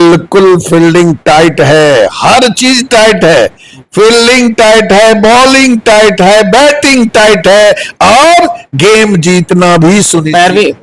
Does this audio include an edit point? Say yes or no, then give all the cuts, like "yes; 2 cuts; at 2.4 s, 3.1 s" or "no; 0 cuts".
no; 0 cuts